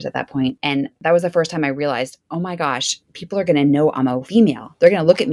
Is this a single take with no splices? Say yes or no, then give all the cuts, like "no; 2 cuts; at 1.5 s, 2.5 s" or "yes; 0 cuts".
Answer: no; 2 cuts; at 0.8 s, 4.2 s